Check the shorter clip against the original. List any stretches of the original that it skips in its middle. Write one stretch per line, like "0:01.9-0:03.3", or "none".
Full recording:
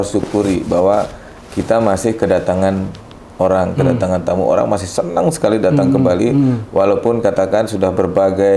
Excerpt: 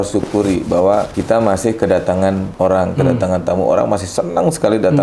0:01.1-0:01.5
0:02.9-0:03.3